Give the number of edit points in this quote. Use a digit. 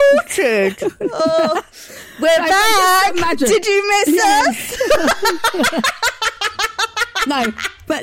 0